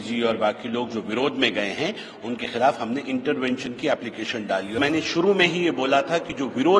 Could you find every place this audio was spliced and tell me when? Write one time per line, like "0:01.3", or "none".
0:04.8